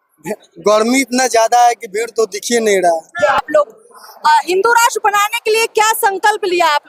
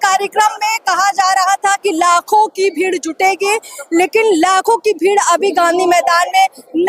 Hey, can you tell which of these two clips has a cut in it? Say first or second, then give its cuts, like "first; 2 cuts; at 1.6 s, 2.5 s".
first; 1 cut; at 3.4 s